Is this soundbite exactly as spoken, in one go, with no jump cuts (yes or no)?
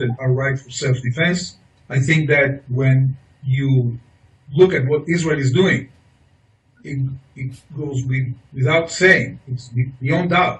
yes